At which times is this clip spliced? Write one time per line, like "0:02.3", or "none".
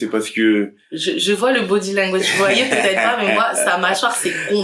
none